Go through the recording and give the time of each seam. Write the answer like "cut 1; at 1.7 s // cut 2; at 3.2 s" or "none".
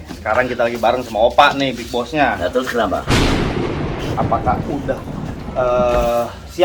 cut 1; at 3.0 s // cut 2; at 4.2 s